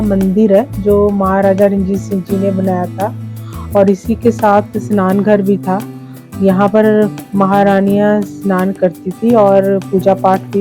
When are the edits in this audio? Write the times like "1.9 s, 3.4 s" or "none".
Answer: none